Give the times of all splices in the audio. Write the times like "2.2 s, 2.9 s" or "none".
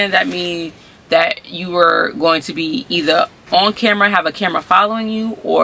none